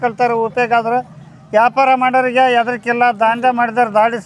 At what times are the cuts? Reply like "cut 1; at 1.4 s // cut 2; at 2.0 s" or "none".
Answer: none